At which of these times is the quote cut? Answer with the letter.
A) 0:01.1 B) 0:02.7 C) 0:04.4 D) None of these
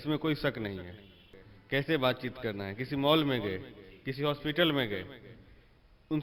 D